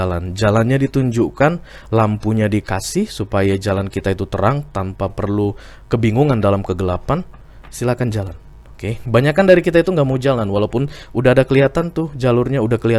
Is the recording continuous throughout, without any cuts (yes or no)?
yes